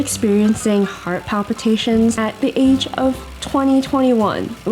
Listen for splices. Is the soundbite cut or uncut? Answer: cut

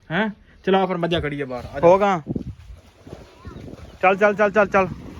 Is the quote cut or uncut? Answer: cut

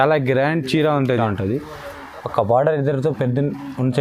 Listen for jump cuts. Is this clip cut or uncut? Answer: cut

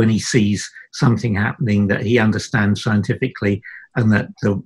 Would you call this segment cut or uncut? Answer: uncut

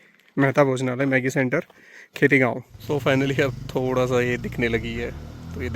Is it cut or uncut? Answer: cut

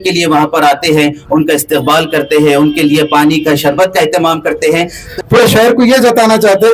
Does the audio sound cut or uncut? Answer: cut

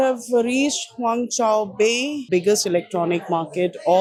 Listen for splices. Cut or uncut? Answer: uncut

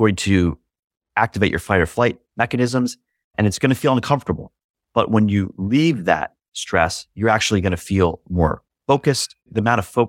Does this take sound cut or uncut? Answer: cut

